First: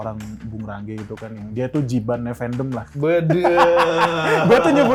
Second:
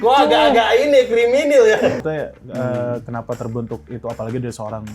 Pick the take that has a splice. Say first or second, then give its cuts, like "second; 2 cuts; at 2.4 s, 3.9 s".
second; 1 cut; at 2.0 s